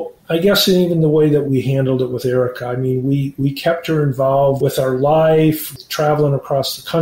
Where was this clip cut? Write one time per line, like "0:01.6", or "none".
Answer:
0:01.5
0:04.6
0:05.8